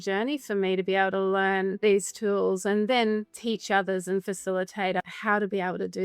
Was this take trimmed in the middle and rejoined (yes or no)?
yes